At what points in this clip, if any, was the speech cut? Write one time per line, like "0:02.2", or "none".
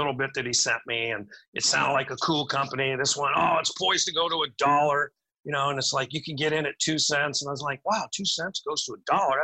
none

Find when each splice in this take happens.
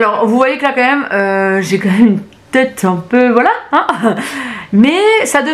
none

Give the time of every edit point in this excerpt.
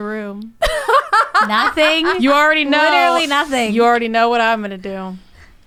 none

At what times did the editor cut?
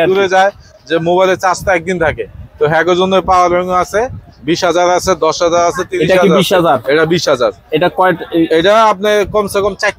none

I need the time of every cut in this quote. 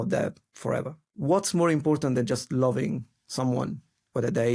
0:01.0

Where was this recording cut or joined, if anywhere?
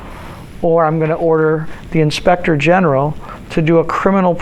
0:01.7

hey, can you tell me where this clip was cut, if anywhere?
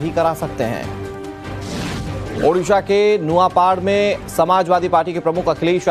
0:04.1

